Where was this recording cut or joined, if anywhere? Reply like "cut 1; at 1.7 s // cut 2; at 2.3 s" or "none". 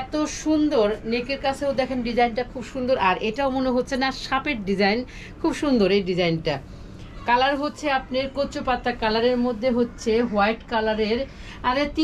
none